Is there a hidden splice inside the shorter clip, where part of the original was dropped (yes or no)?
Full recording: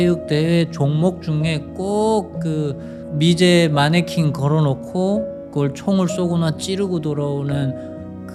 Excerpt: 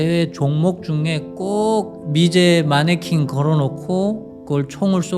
yes